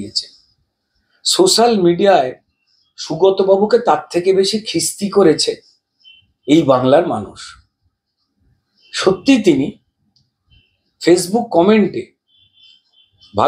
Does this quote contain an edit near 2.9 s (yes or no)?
no